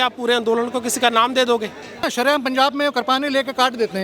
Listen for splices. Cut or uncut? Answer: cut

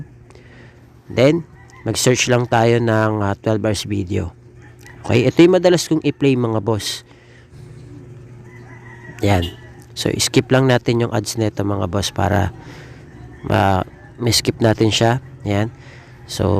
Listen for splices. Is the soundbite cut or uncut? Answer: cut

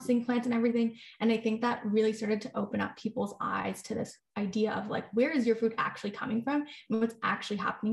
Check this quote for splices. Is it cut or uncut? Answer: uncut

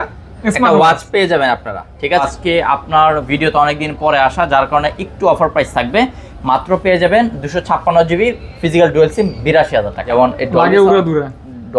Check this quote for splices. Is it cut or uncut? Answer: cut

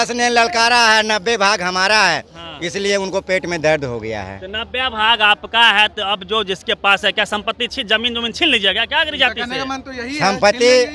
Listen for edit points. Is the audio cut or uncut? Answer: uncut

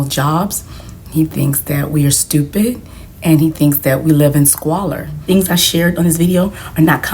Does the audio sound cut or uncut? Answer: cut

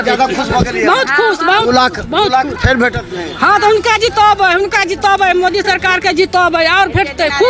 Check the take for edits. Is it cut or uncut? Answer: uncut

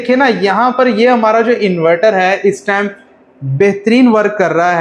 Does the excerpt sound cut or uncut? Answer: uncut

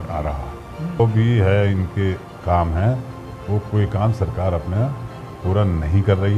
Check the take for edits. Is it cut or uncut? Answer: cut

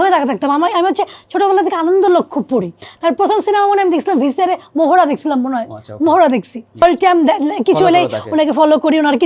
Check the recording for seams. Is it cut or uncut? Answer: cut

